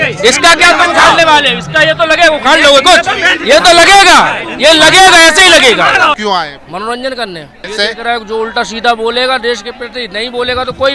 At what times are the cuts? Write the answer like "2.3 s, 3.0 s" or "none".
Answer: 6.2 s, 7.6 s